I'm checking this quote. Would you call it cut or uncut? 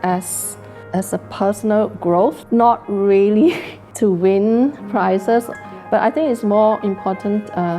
cut